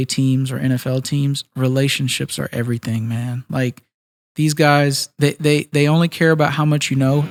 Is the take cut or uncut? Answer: uncut